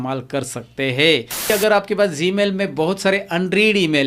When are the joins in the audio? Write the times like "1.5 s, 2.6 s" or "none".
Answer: 1.5 s